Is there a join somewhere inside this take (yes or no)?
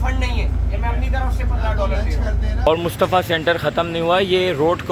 yes